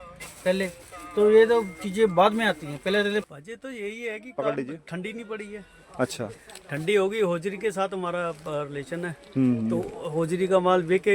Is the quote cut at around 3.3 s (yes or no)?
yes